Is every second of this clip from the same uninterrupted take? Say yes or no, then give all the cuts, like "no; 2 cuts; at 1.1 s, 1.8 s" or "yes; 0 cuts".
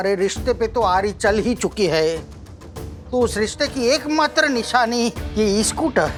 yes; 0 cuts